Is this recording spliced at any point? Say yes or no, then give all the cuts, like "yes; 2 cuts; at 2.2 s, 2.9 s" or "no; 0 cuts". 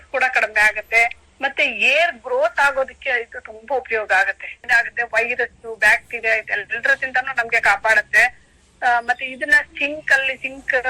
yes; 1 cut; at 4.7 s